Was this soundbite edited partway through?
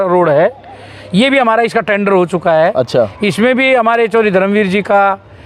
no; 0 cuts

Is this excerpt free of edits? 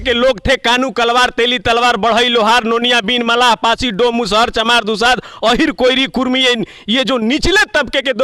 yes; 0 cuts

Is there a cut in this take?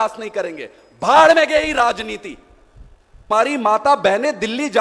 yes; 1 cut; at 3.1 s

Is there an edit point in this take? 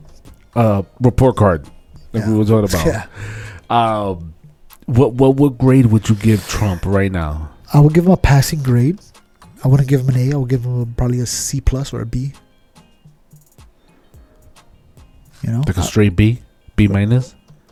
no; 0 cuts

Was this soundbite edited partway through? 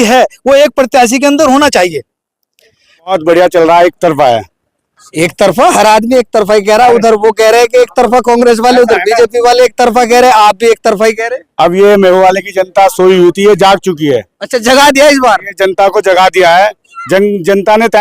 yes; 1 cut; at 3.1 s

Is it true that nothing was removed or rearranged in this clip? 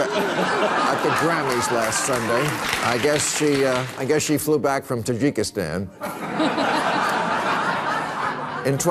no; 1 cut; at 2.6 s

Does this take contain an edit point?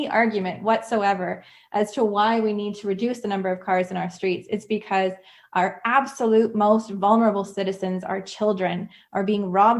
no; 0 cuts

